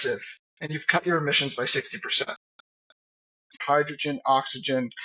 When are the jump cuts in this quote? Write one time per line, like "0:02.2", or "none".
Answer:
0:03.6